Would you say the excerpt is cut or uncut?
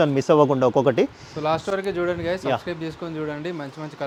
uncut